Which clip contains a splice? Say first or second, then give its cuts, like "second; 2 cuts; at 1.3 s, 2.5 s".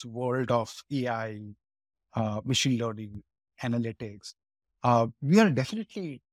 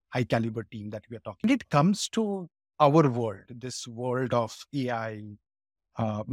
second; 1 cut; at 1.4 s